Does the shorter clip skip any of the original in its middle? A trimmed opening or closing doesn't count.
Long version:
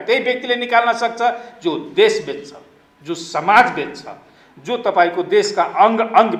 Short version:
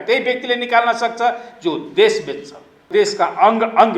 yes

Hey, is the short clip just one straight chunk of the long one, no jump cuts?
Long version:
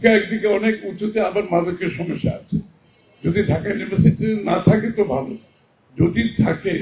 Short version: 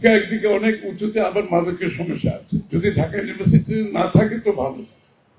no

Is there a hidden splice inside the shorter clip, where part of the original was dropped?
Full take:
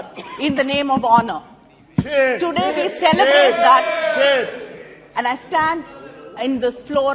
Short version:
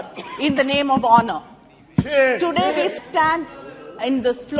yes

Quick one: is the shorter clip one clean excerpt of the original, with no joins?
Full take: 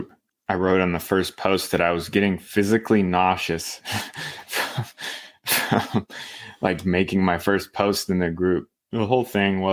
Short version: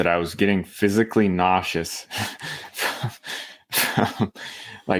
yes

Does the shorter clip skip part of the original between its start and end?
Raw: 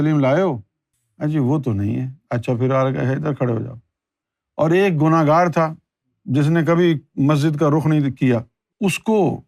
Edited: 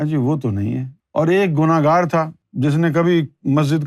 yes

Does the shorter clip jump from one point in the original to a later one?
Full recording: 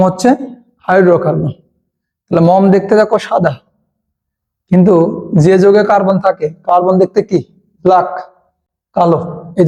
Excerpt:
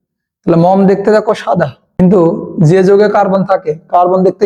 yes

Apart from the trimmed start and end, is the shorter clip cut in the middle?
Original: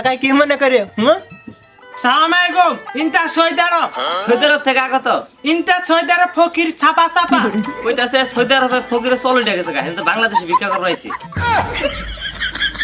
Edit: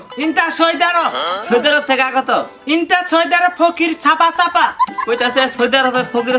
no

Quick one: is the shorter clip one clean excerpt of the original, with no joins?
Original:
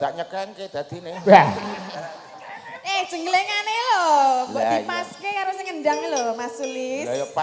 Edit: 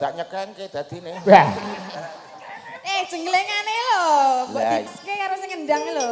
no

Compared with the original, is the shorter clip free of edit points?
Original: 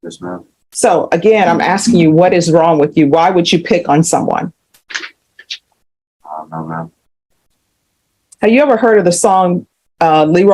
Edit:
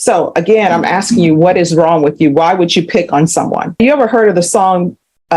no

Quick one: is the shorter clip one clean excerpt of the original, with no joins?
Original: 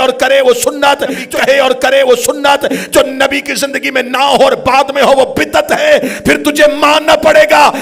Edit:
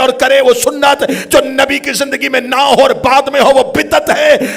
no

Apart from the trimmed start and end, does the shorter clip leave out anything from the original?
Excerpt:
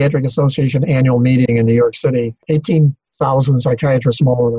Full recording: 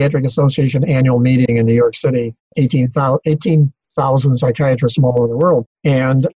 yes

